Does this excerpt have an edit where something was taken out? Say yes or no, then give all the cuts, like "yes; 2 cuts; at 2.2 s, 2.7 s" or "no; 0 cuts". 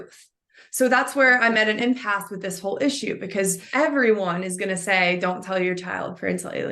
yes; 1 cut; at 3.6 s